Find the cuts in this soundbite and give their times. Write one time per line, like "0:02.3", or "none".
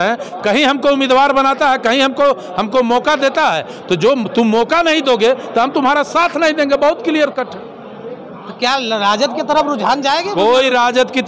none

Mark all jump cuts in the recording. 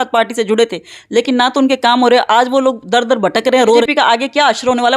0:03.8

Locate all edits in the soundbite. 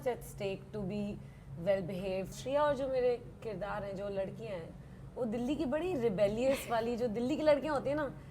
0:02.4

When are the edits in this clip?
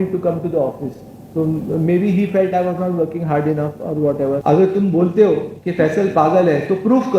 0:04.4

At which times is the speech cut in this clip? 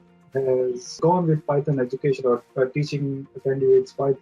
0:01.0

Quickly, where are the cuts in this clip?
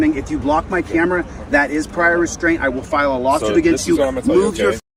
none

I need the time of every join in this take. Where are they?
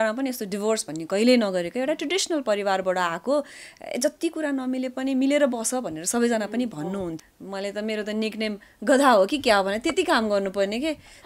0:07.2

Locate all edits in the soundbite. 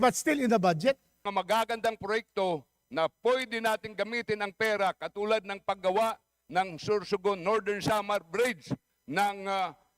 0:01.1

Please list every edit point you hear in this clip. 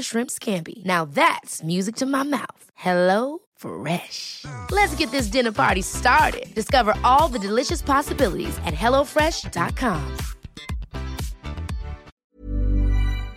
0:12.1

